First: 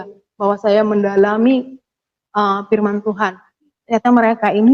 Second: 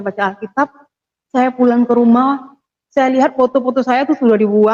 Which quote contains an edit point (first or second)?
first